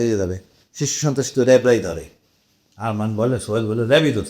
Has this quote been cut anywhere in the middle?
no; 0 cuts

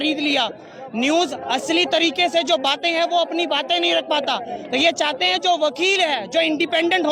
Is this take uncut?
yes; 0 cuts

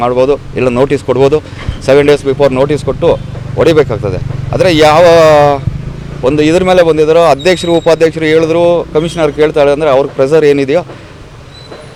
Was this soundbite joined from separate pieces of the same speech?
no; 0 cuts

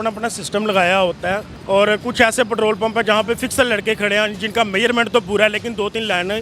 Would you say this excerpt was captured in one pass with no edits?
no; 1 cut; at 1.5 s

